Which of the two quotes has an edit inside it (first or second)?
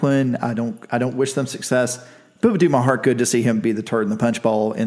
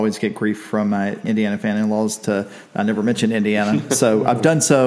second